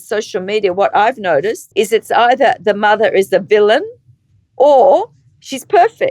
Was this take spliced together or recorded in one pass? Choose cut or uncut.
cut